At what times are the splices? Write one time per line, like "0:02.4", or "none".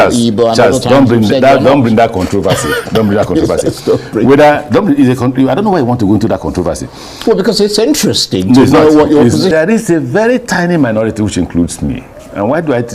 0:09.5